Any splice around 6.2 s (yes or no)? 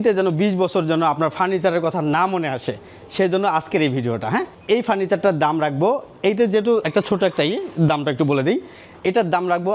no